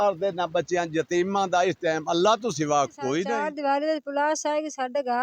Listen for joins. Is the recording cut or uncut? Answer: cut